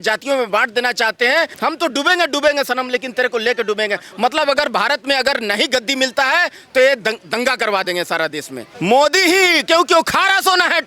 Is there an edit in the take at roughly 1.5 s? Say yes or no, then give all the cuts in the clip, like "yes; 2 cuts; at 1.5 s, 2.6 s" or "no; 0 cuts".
yes; 2 cuts; at 1.5 s, 8.7 s